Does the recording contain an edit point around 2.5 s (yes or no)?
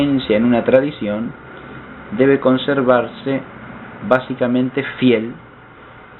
no